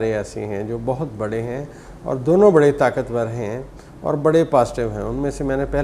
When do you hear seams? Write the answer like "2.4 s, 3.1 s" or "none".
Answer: none